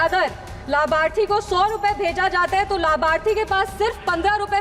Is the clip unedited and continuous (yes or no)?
yes